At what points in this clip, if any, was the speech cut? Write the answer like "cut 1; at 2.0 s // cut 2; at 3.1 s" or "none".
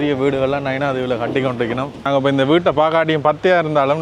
cut 1; at 2.1 s